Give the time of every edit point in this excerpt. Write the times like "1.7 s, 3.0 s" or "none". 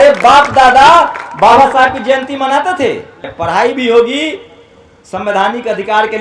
3.3 s